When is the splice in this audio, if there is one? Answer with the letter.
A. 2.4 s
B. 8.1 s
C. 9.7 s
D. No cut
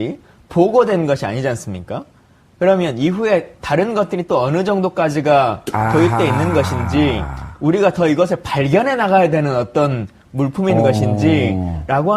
B